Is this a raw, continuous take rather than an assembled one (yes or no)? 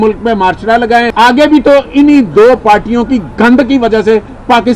no